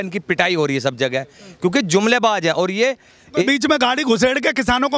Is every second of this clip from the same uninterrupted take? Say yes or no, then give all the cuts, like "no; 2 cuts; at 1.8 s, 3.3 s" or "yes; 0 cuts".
no; 1 cut; at 3.4 s